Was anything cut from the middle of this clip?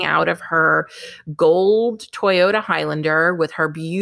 no; 0 cuts

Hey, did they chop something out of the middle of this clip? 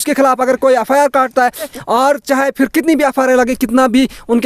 yes; 1 cut; at 1.7 s

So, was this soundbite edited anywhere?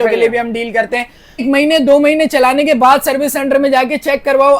yes; 1 cut; at 1.4 s

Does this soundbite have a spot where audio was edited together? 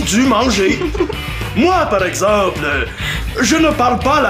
no; 0 cuts

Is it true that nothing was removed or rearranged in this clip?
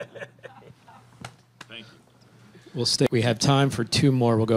no; 1 cut; at 3.1 s

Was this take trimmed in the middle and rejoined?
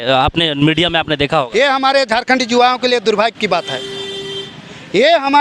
no; 0 cuts

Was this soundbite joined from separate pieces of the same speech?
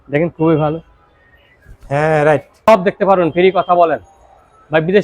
yes; 1 cut; at 2.5 s

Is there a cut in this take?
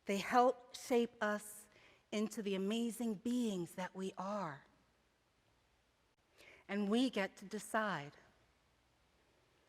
yes; 1 cut; at 5.5 s

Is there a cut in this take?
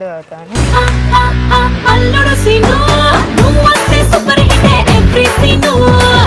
no; 0 cuts

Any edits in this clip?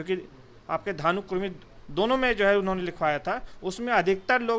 no; 0 cuts

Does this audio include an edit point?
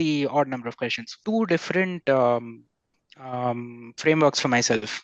yes; 1 cut; at 1.1 s

